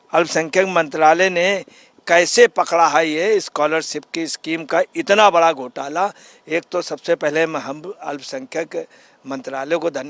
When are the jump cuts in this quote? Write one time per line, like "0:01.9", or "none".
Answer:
none